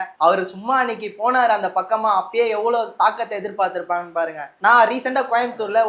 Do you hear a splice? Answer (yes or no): yes